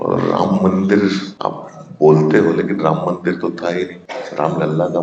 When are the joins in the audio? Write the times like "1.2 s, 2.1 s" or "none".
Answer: 1.3 s, 4.1 s